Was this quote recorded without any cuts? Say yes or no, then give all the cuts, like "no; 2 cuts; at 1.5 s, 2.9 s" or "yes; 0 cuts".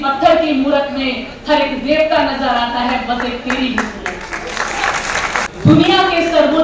no; 1 cut; at 5.5 s